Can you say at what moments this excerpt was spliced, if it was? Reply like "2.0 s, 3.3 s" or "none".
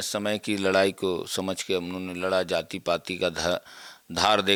none